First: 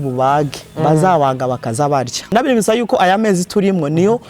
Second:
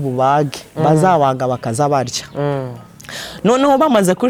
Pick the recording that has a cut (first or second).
first